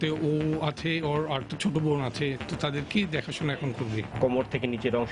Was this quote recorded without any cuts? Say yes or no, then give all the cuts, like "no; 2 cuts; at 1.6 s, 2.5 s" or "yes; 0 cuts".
no; 2 cuts; at 1.0 s, 4.1 s